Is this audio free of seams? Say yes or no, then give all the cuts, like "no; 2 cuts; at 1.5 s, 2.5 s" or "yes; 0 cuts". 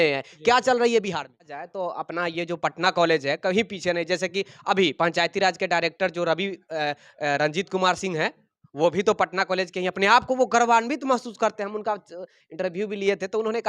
no; 1 cut; at 1.5 s